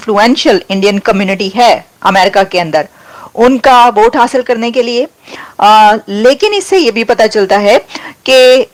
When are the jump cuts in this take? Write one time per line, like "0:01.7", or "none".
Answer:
none